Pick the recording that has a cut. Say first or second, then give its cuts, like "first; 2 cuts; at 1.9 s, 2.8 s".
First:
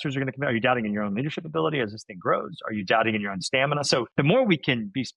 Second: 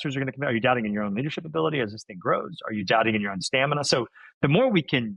first; 1 cut; at 4.1 s